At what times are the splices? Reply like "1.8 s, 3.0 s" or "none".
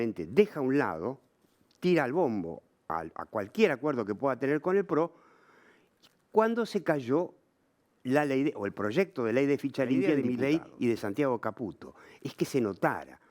10.2 s